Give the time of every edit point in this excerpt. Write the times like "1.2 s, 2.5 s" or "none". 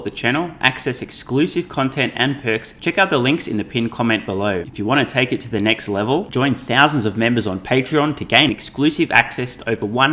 2.7 s, 4.7 s